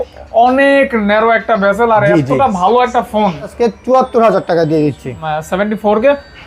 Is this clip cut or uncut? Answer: cut